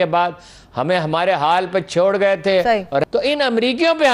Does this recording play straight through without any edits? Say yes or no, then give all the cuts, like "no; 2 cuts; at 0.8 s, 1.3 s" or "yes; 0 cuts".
no; 1 cut; at 3.0 s